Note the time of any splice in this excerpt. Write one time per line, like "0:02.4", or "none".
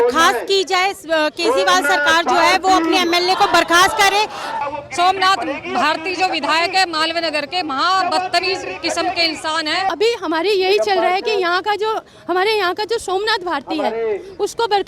0:04.6
0:09.9